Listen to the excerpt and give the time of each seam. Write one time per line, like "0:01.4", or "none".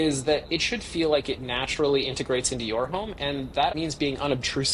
0:03.7